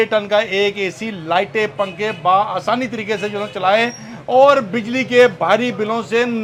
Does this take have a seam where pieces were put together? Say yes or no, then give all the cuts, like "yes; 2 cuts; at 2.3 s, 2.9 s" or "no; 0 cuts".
no; 0 cuts